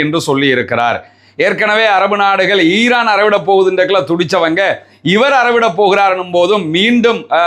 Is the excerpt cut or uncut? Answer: uncut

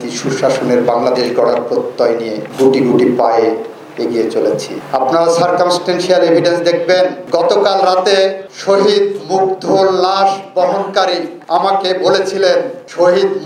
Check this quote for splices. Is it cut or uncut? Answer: uncut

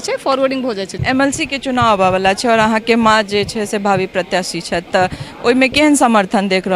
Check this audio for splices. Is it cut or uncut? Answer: cut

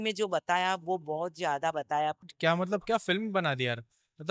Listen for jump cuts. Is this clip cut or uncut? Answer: cut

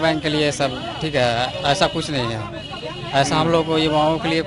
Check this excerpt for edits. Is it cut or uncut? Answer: uncut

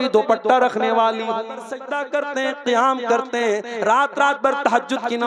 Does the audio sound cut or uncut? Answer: cut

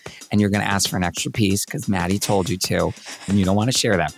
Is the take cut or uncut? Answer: cut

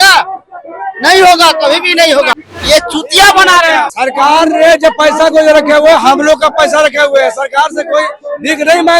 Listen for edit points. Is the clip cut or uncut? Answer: cut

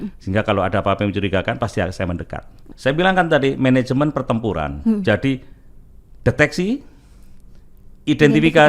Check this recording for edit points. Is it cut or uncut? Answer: cut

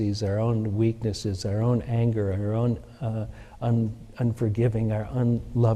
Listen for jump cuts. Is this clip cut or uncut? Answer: uncut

